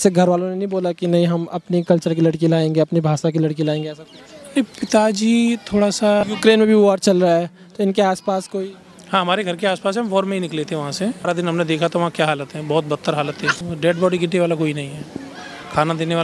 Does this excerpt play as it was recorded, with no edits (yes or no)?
no